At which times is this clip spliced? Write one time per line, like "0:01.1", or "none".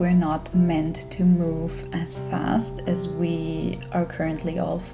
none